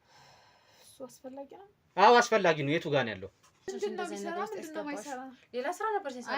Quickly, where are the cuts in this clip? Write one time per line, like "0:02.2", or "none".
0:03.7